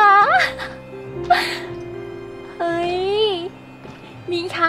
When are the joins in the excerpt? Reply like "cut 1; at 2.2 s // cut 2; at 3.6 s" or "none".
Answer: none